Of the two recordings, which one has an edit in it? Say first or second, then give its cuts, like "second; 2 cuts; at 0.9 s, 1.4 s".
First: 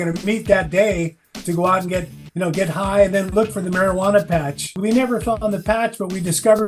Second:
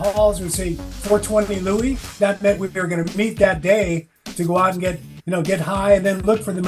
first; 1 cut; at 4.7 s